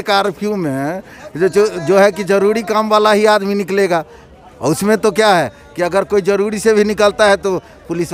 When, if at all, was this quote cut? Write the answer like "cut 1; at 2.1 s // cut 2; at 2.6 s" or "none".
none